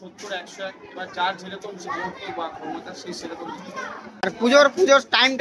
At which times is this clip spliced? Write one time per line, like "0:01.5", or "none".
0:04.2